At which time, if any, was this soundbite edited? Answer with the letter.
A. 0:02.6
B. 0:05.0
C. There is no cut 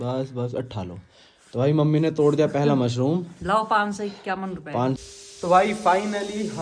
B